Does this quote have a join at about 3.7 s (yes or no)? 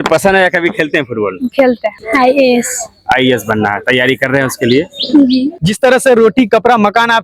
no